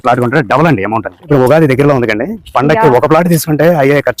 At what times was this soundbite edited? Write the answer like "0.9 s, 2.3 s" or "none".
1.3 s